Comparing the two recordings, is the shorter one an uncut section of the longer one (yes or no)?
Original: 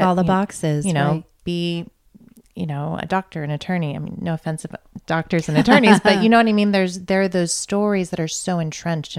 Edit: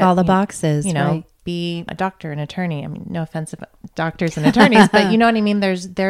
no